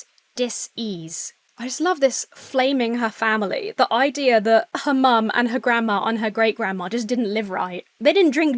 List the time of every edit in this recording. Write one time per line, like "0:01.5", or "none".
0:01.4
0:04.7